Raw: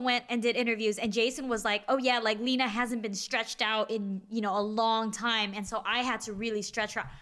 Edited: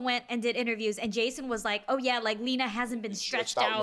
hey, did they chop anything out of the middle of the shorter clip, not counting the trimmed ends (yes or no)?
no